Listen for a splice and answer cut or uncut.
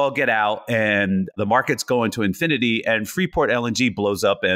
cut